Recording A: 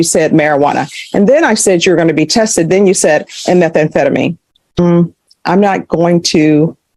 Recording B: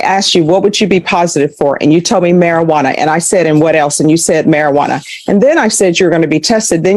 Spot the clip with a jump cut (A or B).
A